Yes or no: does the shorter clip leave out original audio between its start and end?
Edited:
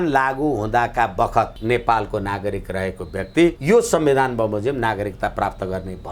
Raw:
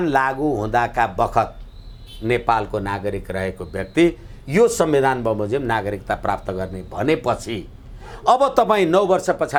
yes